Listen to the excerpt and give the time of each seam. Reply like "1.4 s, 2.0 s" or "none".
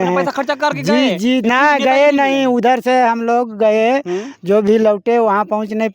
none